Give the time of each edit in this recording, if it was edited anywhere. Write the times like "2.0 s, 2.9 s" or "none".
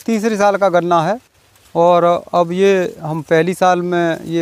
none